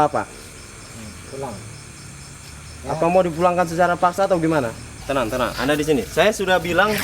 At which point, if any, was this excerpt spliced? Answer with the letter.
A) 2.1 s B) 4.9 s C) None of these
B